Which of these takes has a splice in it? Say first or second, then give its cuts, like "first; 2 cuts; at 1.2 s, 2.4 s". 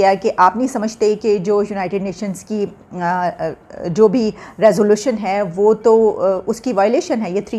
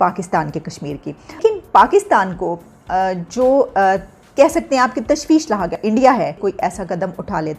second; 3 cuts; at 1.4 s, 5.8 s, 6.4 s